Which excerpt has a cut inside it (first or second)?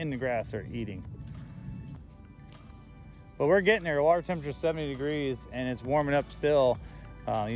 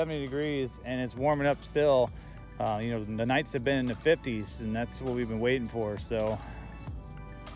first